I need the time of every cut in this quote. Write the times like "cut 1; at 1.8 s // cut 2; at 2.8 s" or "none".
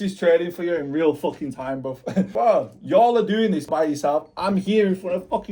cut 1; at 2.3 s // cut 2; at 3.7 s